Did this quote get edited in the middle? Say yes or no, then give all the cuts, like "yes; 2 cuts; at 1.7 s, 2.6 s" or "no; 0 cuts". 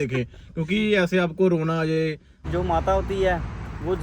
yes; 1 cut; at 2.5 s